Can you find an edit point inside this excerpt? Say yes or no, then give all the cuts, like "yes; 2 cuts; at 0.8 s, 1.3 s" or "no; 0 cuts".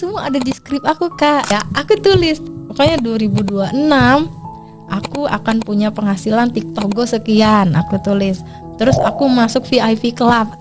yes; 1 cut; at 1.5 s